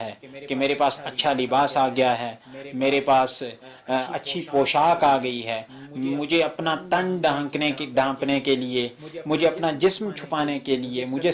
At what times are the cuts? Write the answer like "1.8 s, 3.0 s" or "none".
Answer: none